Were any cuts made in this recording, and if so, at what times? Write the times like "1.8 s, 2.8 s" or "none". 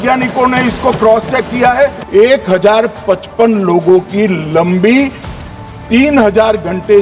2.0 s